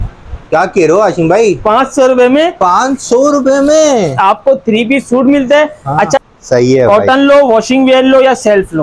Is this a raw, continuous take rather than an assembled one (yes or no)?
no